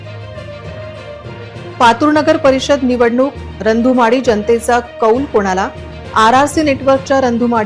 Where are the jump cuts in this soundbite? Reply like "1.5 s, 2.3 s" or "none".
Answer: 1.2 s